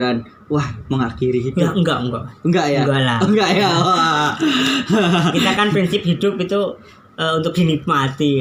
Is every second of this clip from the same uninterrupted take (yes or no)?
yes